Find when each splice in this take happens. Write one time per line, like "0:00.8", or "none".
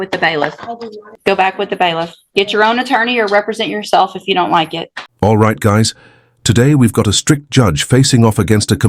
0:01.1
0:04.8